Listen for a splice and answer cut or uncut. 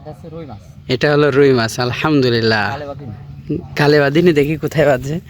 uncut